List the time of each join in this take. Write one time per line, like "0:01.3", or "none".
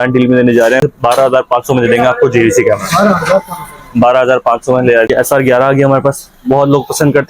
0:00.8
0:05.1